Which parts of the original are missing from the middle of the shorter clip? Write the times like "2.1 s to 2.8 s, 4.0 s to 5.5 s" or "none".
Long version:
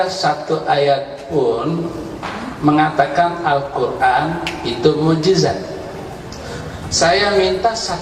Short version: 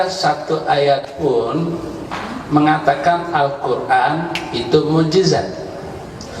1.1 s to 1.2 s